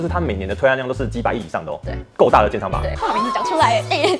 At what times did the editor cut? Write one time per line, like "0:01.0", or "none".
0:02.8

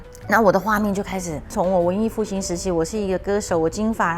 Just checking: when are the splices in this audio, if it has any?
0:01.5

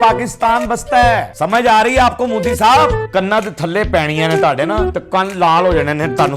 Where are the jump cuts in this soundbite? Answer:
0:01.3
0:03.0
0:04.9

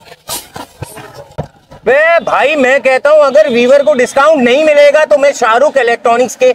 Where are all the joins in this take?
none

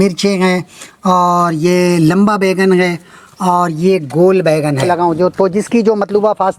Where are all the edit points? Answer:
0:04.9

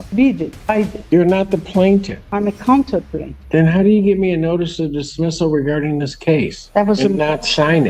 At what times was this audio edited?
none

